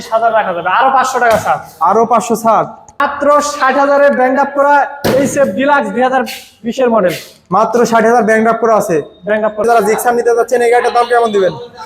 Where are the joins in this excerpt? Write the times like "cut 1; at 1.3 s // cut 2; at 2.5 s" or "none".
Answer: cut 1; at 3.0 s // cut 2; at 9.6 s